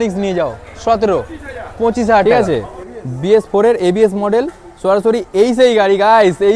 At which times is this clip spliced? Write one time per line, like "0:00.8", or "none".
0:02.2